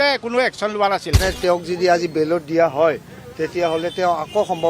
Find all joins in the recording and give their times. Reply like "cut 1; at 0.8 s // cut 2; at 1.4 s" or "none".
cut 1; at 1.2 s